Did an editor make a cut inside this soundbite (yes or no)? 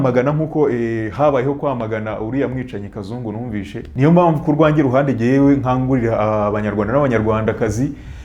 yes